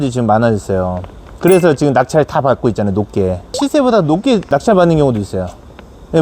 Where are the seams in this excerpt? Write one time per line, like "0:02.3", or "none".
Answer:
0:03.5
0:04.5